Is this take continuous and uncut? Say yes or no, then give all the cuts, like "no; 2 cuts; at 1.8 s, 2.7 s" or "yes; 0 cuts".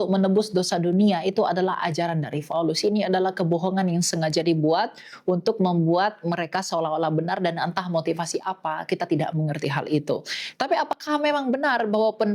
yes; 0 cuts